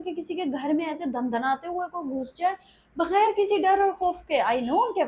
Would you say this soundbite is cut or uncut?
uncut